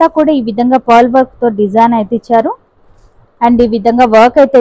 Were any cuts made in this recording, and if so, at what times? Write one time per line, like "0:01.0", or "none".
none